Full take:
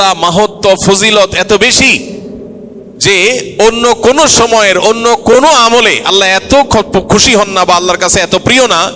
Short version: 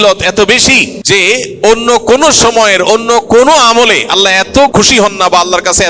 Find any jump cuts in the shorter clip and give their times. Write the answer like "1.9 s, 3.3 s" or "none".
0.9 s, 4.7 s